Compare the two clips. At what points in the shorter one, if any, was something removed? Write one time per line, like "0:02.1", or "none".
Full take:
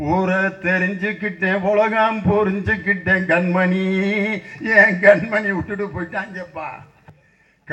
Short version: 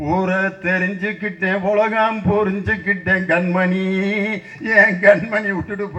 none